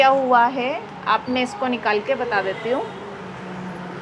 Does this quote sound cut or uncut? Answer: uncut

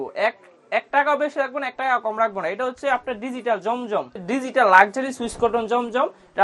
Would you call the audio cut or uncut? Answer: cut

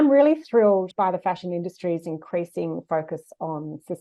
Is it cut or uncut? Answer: cut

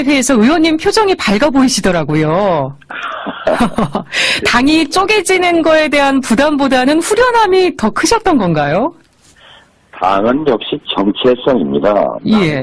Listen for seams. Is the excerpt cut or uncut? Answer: uncut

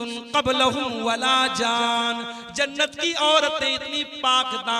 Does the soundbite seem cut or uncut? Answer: uncut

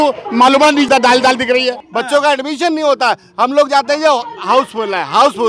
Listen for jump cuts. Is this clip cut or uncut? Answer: cut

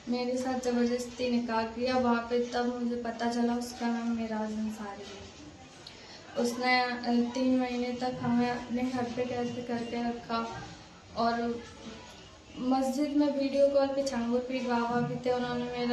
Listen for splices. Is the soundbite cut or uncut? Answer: uncut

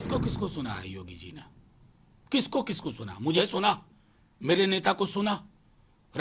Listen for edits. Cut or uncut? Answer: uncut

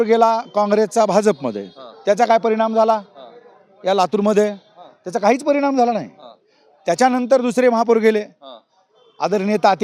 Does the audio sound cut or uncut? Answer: uncut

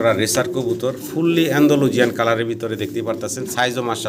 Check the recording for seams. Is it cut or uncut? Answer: uncut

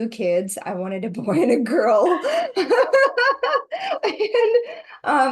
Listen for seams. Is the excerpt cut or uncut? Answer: uncut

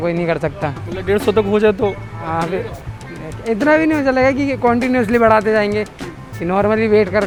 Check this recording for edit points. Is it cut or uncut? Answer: uncut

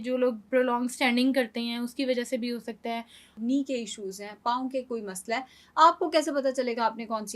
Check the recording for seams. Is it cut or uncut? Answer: cut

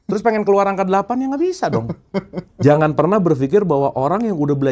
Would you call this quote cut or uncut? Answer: cut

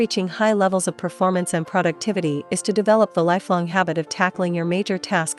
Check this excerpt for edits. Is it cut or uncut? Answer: uncut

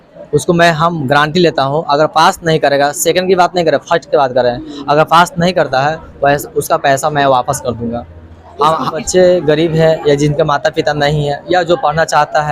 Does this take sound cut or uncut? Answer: cut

